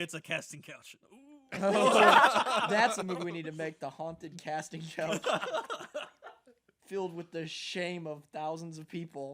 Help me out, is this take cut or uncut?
uncut